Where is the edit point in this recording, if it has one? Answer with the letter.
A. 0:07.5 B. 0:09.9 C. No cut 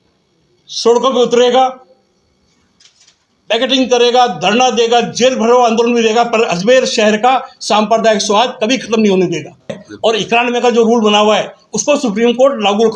B